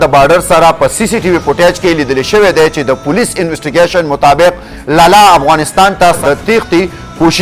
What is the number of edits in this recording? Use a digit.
1